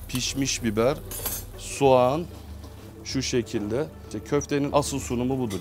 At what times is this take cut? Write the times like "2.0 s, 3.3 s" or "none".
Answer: none